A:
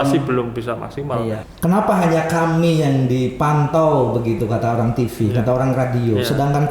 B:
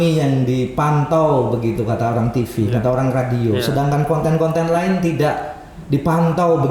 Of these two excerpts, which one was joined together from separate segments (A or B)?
A